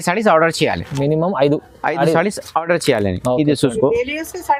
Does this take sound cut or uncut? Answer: uncut